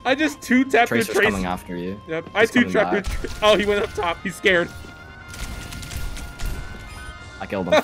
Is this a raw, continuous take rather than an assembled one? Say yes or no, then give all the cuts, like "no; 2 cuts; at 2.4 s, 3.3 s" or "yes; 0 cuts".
yes; 0 cuts